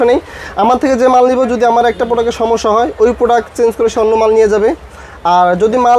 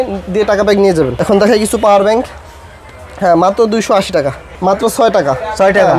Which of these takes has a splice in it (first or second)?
second